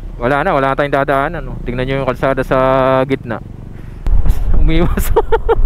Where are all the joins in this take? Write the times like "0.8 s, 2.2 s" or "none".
4.0 s